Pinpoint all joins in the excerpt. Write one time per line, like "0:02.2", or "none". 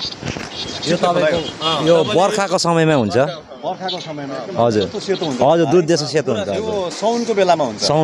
none